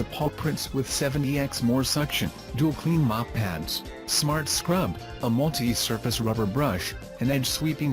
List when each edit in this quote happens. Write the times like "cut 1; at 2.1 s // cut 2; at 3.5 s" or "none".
cut 1; at 3.5 s